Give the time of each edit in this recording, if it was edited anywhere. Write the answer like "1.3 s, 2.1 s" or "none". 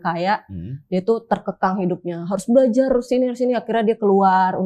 none